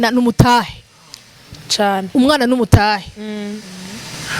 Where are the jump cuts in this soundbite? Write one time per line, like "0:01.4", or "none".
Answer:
none